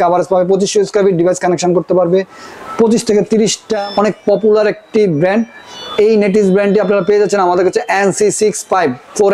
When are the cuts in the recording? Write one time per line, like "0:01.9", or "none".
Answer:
0:03.7